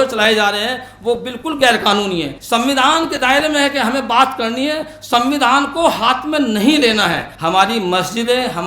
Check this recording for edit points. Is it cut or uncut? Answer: cut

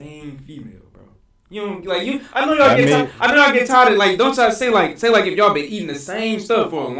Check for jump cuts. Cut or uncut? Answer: uncut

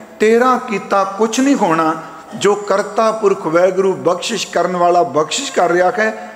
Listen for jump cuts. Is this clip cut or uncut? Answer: uncut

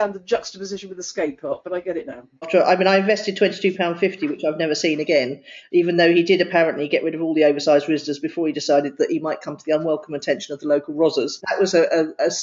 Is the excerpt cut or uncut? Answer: cut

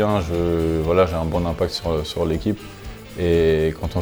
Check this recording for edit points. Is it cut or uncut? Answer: uncut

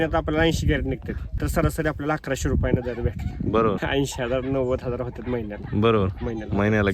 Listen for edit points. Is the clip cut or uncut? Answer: cut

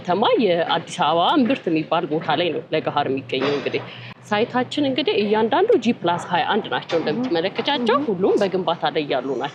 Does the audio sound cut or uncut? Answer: uncut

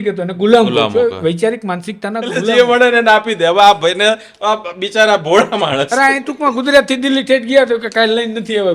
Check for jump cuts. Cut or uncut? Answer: cut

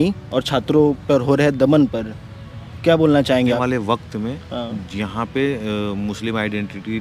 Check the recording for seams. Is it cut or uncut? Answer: cut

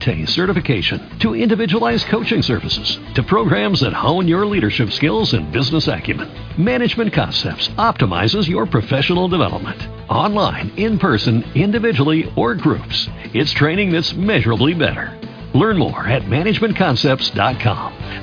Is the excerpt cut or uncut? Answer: uncut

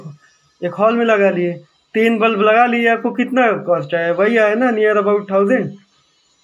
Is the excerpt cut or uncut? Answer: uncut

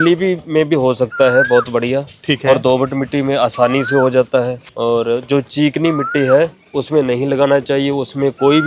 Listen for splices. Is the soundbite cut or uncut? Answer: uncut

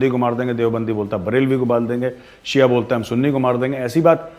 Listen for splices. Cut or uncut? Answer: uncut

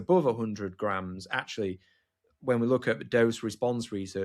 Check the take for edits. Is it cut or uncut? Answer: uncut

